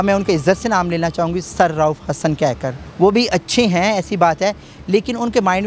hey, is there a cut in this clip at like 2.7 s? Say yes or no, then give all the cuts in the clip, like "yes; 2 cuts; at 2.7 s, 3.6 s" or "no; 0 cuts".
yes; 1 cut; at 2.7 s